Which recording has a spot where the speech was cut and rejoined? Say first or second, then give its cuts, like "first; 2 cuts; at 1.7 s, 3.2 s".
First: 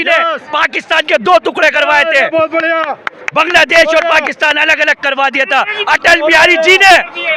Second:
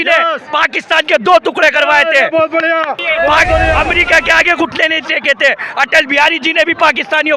second; 1 cut; at 3.0 s